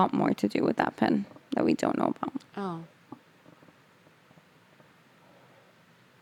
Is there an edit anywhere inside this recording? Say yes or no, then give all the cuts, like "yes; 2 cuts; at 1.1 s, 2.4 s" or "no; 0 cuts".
no; 0 cuts